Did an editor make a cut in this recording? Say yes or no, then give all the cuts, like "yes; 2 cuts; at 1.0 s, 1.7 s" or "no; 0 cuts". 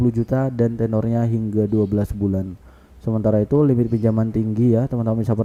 no; 0 cuts